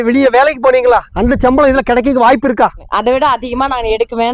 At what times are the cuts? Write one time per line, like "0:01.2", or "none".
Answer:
0:01.1
0:02.9